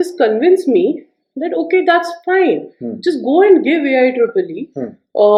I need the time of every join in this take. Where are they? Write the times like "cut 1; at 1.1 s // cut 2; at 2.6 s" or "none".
none